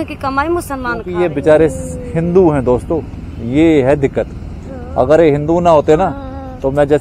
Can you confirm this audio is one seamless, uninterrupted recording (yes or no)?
no